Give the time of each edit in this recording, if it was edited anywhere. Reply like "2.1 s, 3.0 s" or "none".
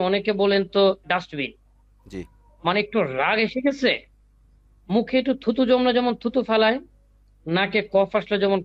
none